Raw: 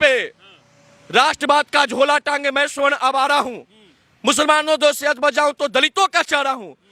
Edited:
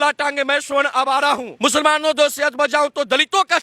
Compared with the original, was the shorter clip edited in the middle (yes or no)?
yes